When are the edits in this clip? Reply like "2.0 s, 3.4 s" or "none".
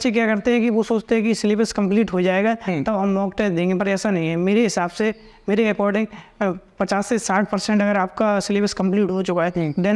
none